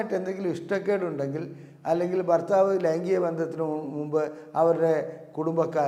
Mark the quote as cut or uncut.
uncut